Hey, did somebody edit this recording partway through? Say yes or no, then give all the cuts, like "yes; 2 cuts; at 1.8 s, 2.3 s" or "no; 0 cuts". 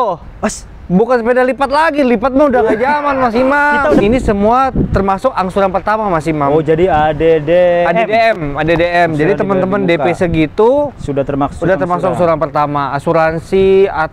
yes; 1 cut; at 4.0 s